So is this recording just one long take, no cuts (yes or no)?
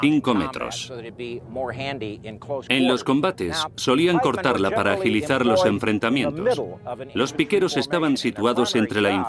yes